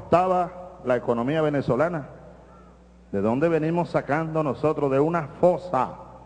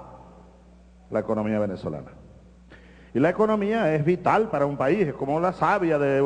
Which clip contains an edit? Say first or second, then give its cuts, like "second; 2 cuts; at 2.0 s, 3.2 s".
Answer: second; 1 cut; at 1.6 s